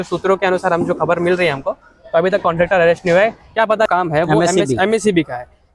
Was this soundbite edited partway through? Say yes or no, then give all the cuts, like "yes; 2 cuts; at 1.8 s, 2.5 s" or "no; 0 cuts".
yes; 1 cut; at 3.9 s